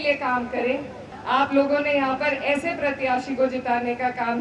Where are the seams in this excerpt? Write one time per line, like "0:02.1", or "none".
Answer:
0:01.1